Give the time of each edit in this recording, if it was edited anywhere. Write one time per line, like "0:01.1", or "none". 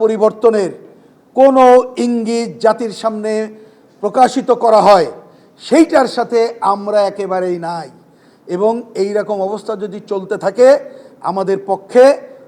none